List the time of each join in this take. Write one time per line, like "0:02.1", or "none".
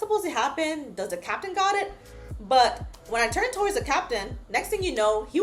none